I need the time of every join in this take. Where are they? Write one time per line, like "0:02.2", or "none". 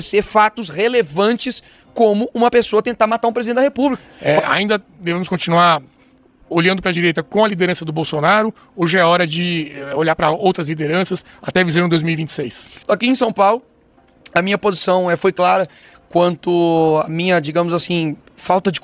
0:04.1
0:12.7